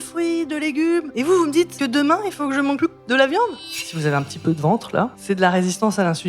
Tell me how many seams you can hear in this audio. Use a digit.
5